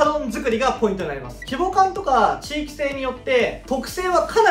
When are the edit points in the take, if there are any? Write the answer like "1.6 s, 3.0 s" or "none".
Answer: 1.3 s

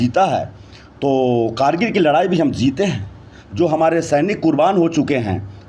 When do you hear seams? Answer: none

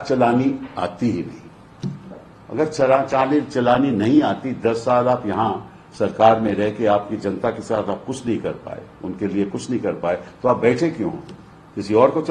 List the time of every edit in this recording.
none

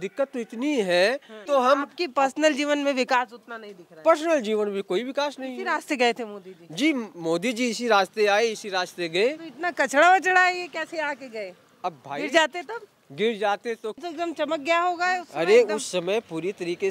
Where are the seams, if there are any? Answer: 1.3 s, 14.0 s

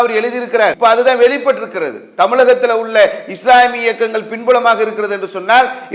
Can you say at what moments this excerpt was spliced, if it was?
0.8 s, 2.0 s

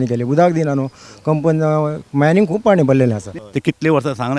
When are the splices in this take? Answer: 3.3 s

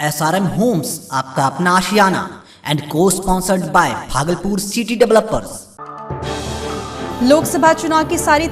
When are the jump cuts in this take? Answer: none

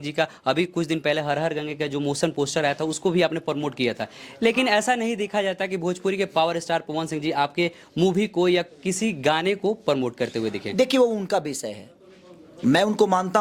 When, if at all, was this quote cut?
none

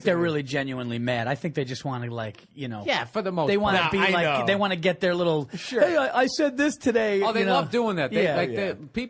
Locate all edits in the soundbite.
none

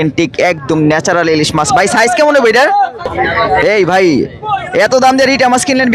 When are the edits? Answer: 3.0 s

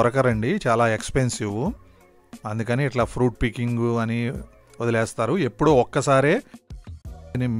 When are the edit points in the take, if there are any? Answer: none

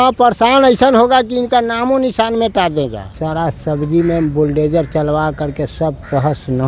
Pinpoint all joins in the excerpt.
3.2 s

